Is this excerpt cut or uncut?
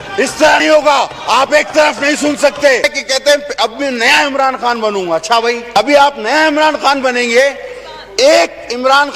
cut